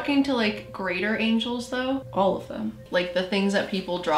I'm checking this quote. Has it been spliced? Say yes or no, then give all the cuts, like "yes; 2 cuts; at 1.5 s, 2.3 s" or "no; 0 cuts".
yes; 2 cuts; at 2.1 s, 2.8 s